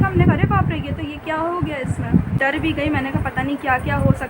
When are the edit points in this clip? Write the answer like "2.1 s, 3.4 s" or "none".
2.4 s